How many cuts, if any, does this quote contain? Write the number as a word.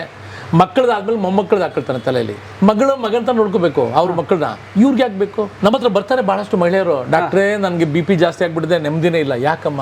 two